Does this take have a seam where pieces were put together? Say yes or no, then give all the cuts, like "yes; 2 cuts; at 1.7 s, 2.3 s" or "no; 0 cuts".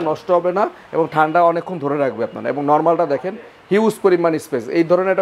no; 0 cuts